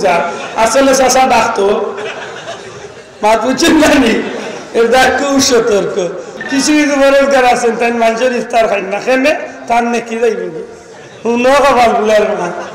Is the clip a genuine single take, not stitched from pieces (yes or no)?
no